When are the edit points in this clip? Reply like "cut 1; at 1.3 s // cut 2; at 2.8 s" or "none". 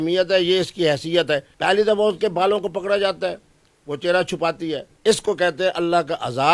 cut 1; at 1.5 s // cut 2; at 4.8 s